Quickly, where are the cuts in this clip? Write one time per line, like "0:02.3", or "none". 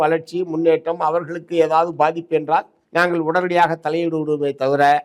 0:02.8